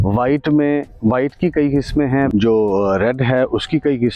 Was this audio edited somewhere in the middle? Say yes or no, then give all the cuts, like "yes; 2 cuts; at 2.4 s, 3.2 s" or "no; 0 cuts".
yes; 1 cut; at 2.3 s